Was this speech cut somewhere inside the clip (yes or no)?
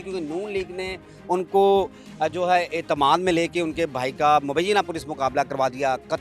no